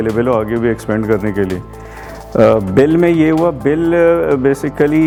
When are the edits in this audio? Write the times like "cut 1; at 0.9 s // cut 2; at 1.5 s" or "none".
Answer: none